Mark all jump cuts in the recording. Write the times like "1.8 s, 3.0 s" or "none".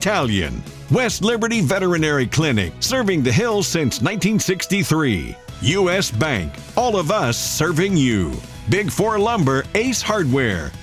none